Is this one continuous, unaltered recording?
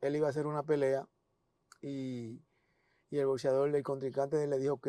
yes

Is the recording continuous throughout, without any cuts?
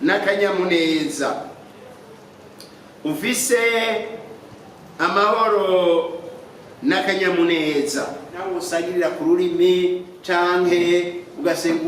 no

